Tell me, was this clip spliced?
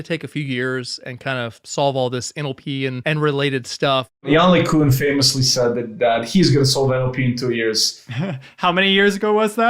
yes; 2 cuts; at 1.6 s, 3.0 s

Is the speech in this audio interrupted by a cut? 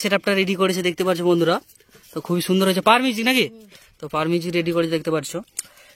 no; 0 cuts

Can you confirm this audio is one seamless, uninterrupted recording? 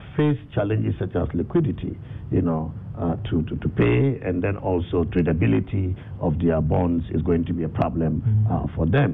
yes; 0 cuts

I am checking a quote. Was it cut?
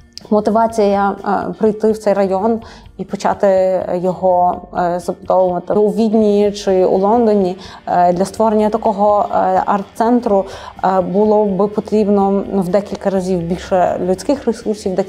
yes; 1 cut; at 5.8 s

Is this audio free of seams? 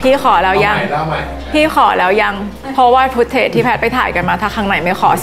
yes; 0 cuts

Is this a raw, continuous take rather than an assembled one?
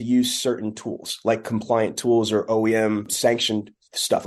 no; 1 cut; at 3.1 s

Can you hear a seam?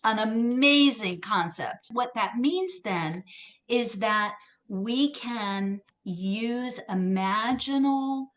yes; 2 cuts; at 1.8 s, 5.9 s

